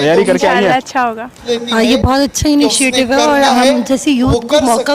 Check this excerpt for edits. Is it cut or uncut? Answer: cut